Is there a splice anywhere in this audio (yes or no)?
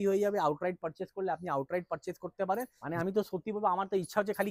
yes